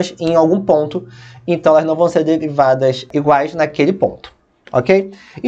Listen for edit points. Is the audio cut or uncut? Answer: cut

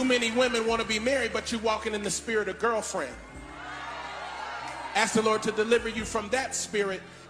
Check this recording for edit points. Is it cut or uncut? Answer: uncut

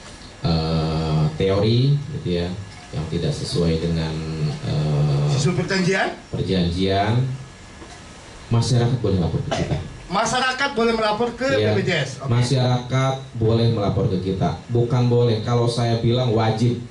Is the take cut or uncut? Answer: uncut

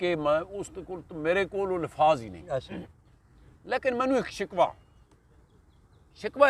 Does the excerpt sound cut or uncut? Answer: uncut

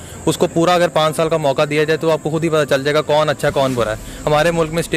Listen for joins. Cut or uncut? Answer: uncut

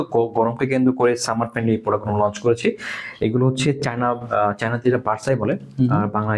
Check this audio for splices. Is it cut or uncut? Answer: uncut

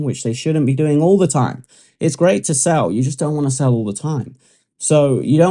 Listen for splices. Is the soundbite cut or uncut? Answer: uncut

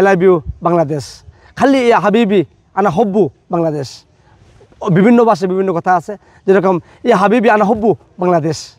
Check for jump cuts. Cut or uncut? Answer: uncut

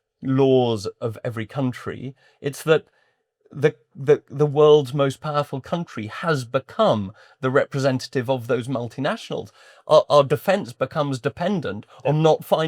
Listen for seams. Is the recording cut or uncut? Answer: uncut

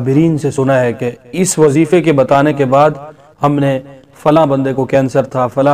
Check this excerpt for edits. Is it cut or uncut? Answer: uncut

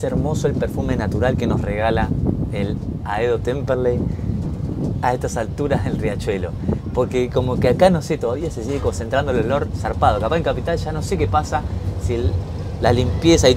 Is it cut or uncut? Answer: uncut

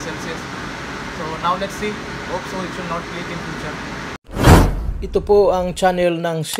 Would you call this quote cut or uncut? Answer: cut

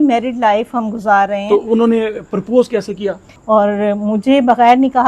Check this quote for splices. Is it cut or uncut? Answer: cut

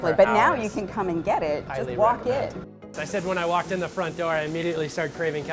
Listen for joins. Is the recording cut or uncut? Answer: cut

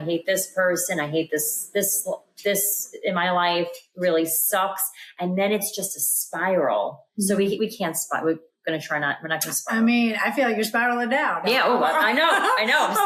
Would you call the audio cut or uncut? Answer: uncut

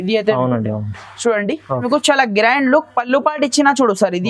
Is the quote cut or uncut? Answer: cut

